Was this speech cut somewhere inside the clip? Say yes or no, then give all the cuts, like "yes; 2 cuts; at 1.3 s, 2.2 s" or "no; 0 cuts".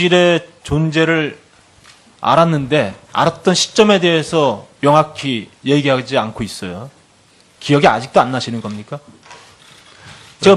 no; 0 cuts